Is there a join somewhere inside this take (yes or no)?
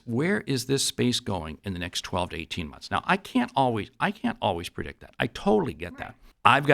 yes